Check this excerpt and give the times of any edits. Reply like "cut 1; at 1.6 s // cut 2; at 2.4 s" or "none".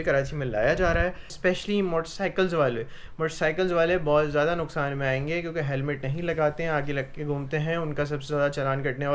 cut 1; at 1.3 s